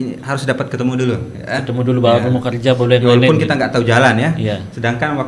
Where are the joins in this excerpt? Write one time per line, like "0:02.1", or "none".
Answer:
none